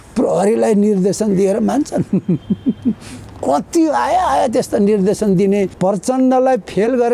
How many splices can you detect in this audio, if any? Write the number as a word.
one